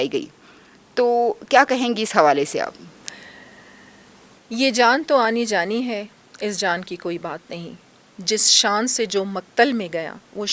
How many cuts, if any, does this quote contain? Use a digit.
0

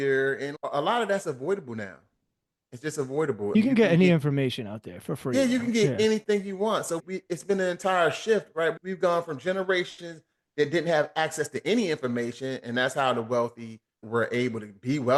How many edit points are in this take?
0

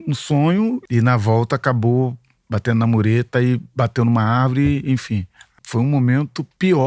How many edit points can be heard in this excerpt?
2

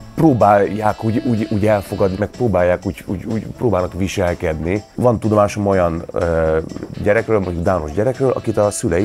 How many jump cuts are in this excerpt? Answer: 1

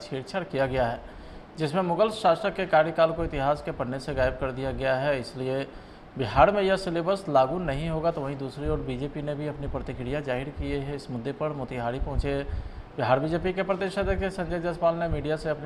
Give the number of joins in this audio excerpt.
0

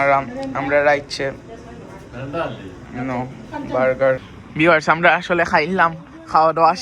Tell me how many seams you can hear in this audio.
1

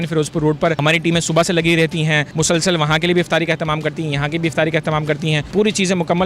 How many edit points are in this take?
3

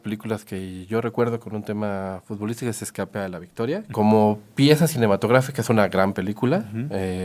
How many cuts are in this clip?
1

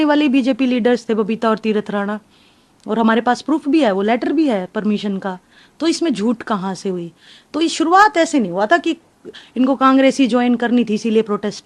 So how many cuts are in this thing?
0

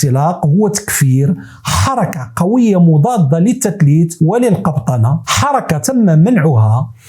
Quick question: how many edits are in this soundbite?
1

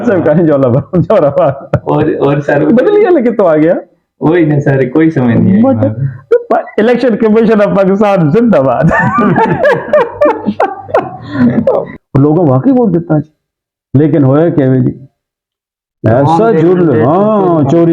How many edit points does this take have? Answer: 1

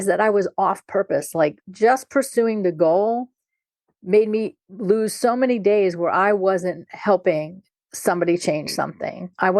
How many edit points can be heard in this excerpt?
1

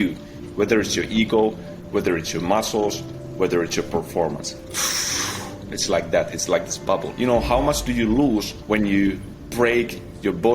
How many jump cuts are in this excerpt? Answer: 3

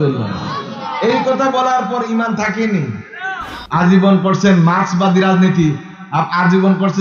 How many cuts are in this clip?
1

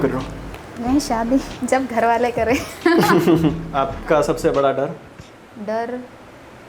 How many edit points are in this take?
1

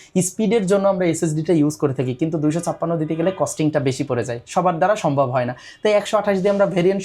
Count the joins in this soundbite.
0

